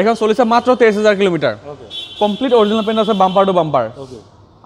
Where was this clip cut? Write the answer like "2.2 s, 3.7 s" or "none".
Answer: none

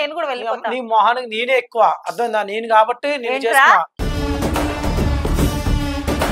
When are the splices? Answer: none

